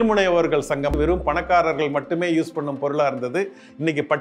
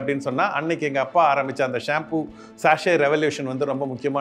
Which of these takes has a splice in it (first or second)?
first